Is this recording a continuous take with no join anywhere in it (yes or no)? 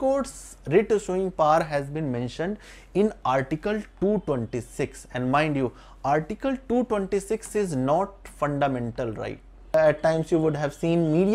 no